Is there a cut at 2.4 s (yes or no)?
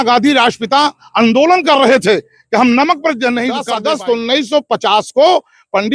no